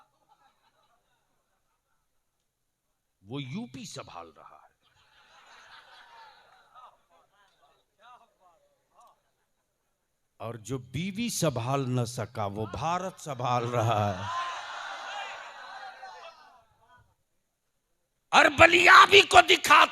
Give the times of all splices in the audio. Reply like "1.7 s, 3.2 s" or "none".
17.1 s

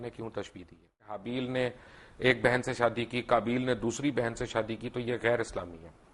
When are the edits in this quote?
1.2 s

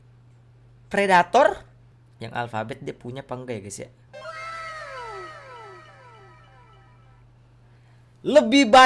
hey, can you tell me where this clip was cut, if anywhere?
1.6 s, 4.0 s

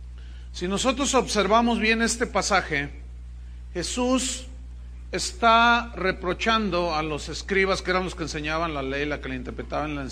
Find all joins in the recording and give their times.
none

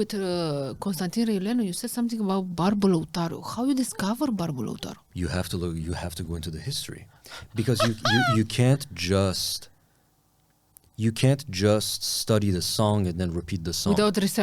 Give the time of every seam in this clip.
none

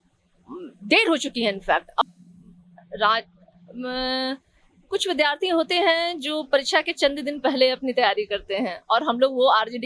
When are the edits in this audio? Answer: 2.1 s

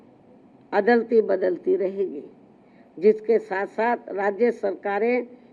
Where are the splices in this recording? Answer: none

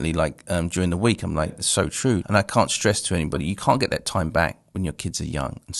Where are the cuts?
2.2 s

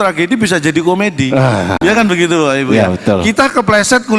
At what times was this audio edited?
none

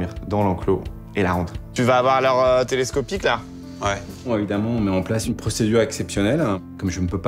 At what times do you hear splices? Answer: 1.6 s

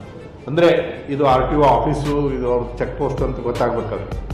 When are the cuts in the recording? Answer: none

